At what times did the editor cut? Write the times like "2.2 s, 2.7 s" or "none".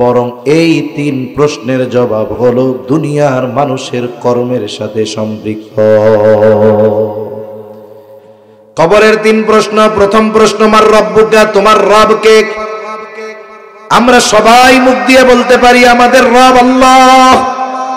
8.2 s